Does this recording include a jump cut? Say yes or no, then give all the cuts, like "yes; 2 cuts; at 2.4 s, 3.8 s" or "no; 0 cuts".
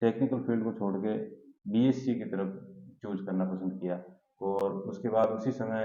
no; 0 cuts